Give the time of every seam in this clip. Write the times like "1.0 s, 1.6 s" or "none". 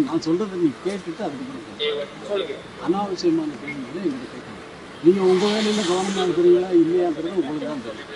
4.8 s